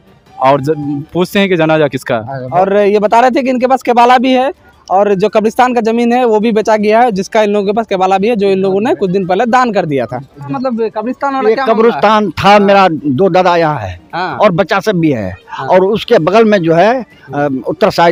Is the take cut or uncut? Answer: uncut